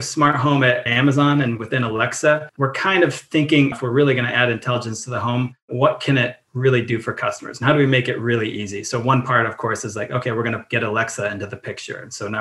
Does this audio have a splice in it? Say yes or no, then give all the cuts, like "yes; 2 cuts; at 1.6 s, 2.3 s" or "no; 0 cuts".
yes; 2 cuts; at 2.5 s, 3.7 s